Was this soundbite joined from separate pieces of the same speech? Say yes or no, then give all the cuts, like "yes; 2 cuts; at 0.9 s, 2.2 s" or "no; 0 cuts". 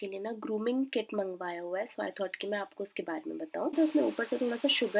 yes; 1 cut; at 3.7 s